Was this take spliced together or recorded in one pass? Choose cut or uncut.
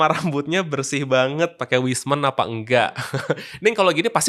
uncut